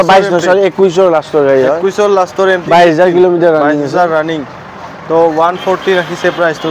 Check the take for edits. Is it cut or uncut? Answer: uncut